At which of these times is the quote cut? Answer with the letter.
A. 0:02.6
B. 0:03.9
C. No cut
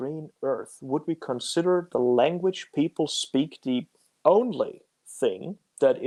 C